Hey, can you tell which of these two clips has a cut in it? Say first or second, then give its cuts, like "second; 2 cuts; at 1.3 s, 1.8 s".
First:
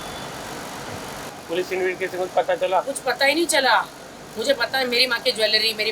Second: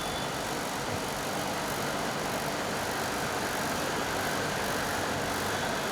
first; 1 cut; at 1.3 s